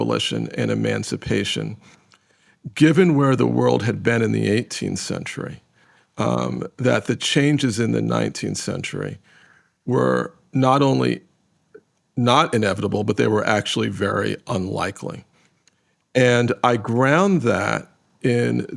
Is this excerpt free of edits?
yes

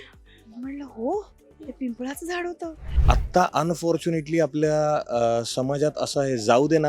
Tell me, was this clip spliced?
yes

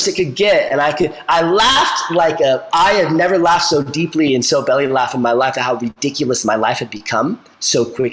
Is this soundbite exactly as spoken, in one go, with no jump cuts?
yes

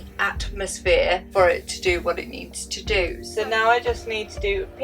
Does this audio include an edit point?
yes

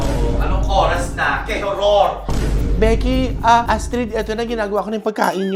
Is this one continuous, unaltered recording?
yes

